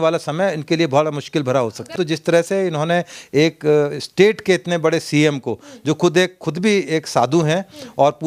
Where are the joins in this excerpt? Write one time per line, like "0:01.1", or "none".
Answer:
0:01.9